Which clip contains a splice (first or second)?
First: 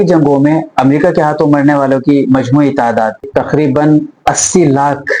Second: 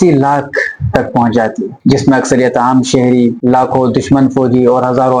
first